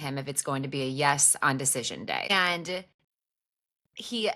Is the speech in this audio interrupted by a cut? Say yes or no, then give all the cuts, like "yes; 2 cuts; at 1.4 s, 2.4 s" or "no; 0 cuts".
yes; 1 cut; at 2.3 s